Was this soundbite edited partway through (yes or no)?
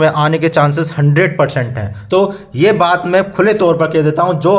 yes